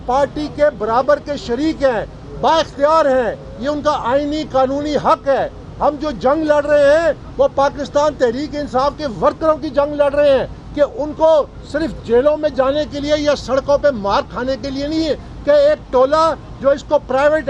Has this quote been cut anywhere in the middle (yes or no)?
no